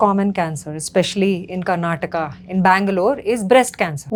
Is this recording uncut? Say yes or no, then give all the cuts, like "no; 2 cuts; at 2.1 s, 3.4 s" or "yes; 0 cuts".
yes; 0 cuts